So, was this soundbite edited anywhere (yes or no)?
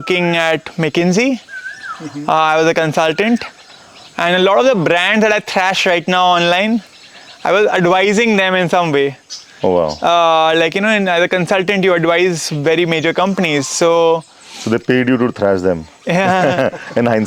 no